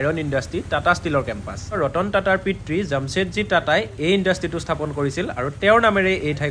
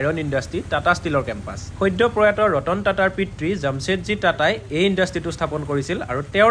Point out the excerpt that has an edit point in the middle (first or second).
first